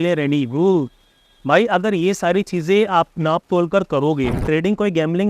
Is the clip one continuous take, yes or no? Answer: no